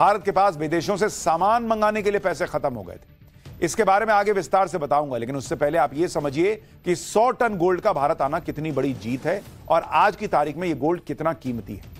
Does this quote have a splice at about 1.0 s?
yes; 1 cut; at 1.0 s

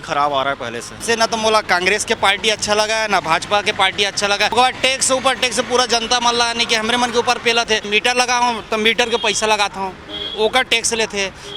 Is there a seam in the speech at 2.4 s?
no; 3 cuts; at 1.0 s, 4.5 s, 7.9 s

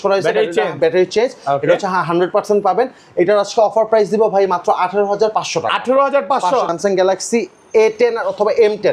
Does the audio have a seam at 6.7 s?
yes; 1 cut; at 6.7 s

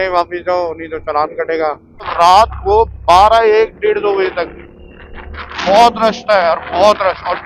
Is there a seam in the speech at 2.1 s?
yes; 1 cut; at 2.1 s

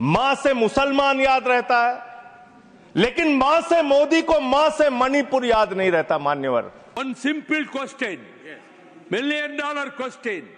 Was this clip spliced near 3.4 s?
no; 1 cut; at 7.0 s

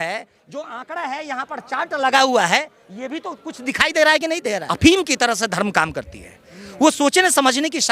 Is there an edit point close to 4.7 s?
yes; 1 cut; at 4.7 s

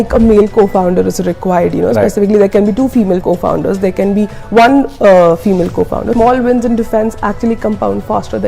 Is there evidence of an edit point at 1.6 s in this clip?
no; 2 cuts; at 3.2 s, 6.1 s

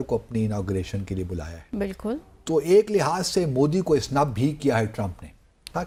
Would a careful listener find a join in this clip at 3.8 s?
no; 0 cuts

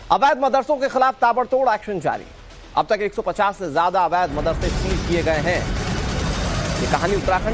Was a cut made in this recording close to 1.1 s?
yes; 1 cut; at 1.1 s

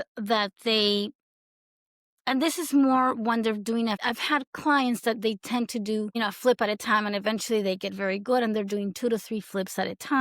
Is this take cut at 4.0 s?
yes; 2 cuts; at 4.0 s, 6.2 s

